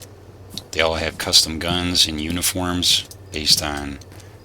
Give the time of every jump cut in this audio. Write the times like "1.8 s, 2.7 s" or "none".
none